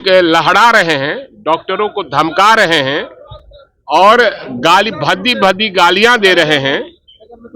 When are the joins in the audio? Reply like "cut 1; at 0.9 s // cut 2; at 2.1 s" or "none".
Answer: none